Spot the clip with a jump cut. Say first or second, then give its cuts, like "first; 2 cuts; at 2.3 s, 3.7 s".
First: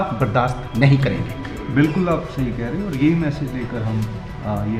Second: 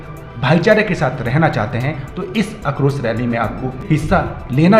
second; 1 cut; at 3.8 s